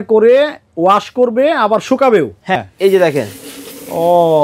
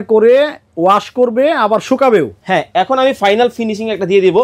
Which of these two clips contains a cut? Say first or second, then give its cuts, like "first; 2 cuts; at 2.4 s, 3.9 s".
first; 1 cut; at 2.6 s